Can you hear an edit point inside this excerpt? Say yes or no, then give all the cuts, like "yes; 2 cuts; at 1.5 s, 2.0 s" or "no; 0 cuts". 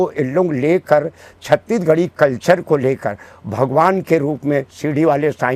no; 0 cuts